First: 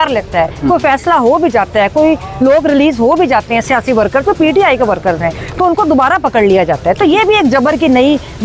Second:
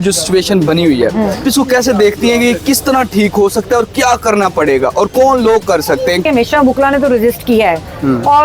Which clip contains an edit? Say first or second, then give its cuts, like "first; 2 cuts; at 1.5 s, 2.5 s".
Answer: second; 2 cuts; at 1.4 s, 6.2 s